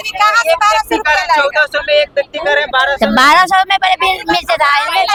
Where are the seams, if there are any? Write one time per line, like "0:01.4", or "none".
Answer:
none